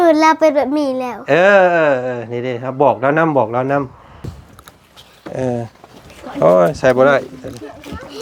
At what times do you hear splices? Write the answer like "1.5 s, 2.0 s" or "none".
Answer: 4.3 s